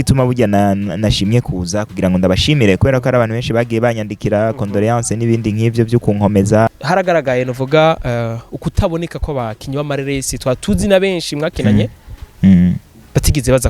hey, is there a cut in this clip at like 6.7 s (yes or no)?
yes